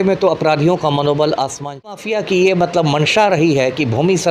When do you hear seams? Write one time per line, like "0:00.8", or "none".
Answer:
0:01.9